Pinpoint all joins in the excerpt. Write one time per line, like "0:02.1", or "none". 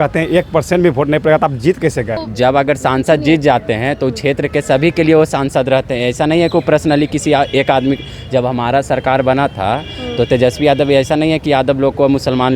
0:02.3